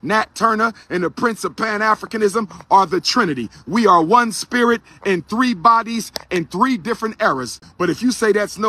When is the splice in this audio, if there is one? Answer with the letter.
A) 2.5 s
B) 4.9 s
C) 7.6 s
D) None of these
C